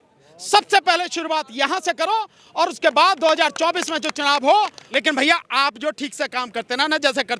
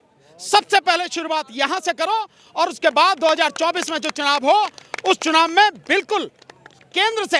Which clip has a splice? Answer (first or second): first